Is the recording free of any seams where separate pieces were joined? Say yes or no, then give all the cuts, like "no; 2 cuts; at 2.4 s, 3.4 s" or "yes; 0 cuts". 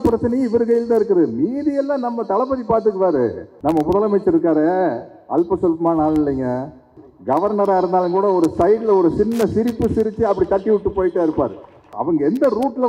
no; 3 cuts; at 3.5 s, 7.0 s, 11.9 s